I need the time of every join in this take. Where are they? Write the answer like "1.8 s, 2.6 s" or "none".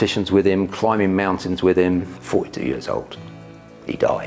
2.1 s